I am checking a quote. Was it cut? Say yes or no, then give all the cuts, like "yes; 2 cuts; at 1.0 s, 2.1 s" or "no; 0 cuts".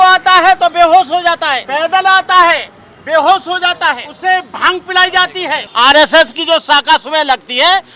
yes; 3 cuts; at 1.6 s, 4.1 s, 5.6 s